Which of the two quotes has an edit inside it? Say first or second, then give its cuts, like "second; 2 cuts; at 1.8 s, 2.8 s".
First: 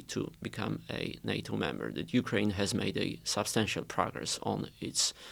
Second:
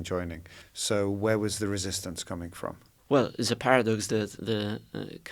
second; 2 cuts; at 2.9 s, 4.4 s